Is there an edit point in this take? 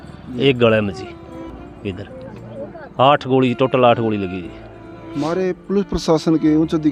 no; 0 cuts

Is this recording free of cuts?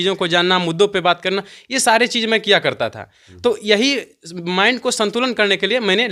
yes; 0 cuts

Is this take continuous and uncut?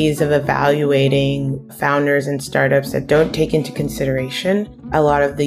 yes; 0 cuts

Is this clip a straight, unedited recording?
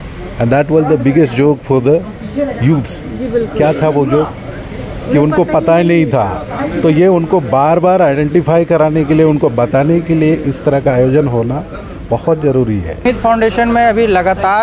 no; 1 cut; at 13.1 s

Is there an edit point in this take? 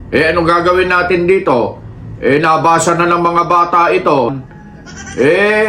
yes; 1 cut; at 4.3 s

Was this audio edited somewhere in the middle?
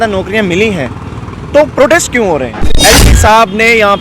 yes; 1 cut; at 2.8 s

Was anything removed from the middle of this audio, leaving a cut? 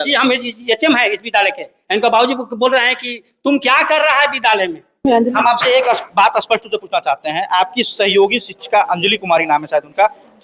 yes; 1 cut; at 5.0 s

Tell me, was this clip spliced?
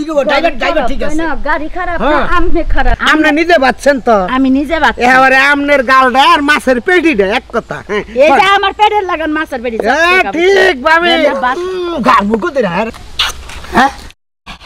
yes; 2 cuts; at 3.0 s, 13.0 s

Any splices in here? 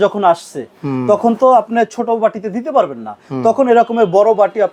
no; 0 cuts

